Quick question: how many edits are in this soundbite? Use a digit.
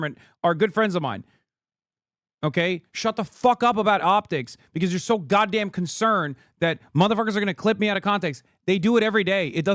0